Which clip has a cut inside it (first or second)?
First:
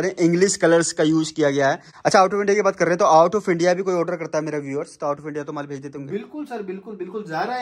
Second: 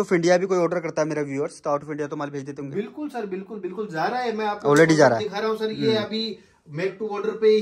first